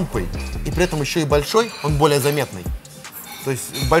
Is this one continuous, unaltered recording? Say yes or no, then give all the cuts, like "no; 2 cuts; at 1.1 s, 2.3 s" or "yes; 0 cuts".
yes; 0 cuts